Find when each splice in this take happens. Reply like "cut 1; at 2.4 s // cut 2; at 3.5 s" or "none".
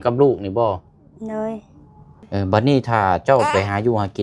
cut 1; at 2.2 s